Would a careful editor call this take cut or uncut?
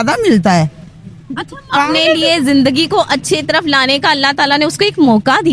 cut